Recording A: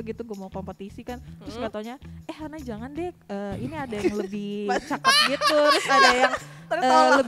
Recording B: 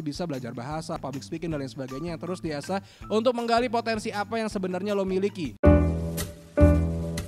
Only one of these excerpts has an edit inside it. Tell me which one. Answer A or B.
B